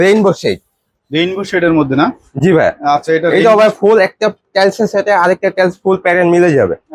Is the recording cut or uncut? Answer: uncut